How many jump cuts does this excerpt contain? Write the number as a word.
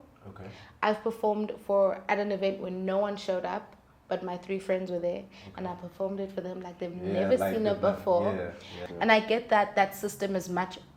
one